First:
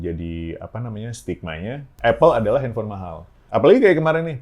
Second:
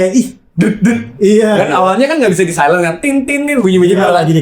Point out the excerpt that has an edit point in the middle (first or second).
first